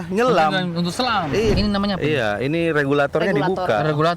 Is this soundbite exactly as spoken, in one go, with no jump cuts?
no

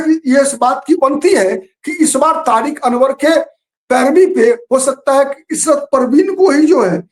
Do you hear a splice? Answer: no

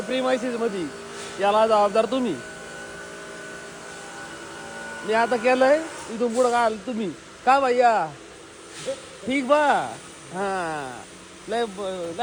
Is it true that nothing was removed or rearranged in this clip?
yes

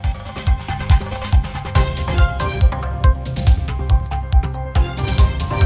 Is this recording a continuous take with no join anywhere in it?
no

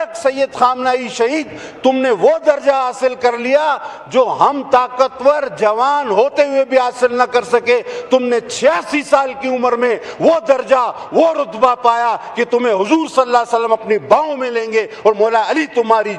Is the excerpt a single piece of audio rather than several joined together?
yes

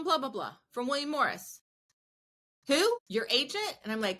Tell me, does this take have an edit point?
yes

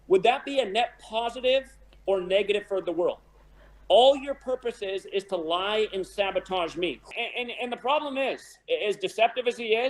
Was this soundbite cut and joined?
yes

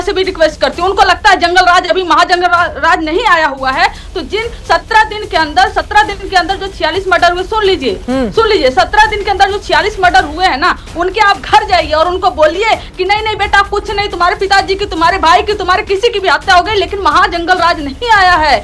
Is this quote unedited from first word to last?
yes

